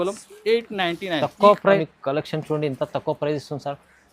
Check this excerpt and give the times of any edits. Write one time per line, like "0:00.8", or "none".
0:01.8